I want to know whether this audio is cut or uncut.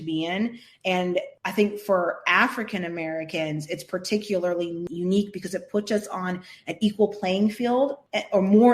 cut